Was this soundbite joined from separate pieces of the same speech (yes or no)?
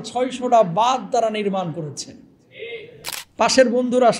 yes